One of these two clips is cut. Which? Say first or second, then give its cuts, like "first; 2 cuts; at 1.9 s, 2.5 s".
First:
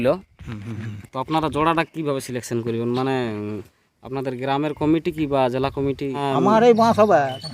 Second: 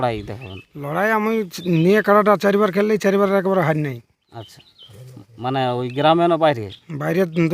first; 1 cut; at 6.2 s